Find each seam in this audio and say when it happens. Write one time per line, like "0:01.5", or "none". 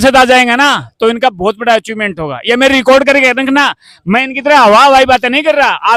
none